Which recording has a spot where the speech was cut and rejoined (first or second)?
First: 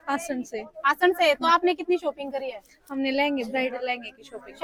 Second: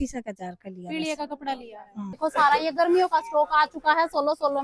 second